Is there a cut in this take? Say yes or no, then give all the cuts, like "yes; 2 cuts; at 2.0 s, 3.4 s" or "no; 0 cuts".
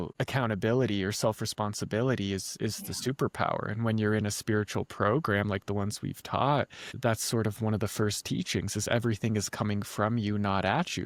no; 0 cuts